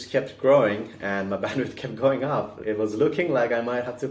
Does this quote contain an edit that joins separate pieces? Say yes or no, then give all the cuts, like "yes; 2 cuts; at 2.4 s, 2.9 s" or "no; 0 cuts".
yes; 1 cut; at 2.5 s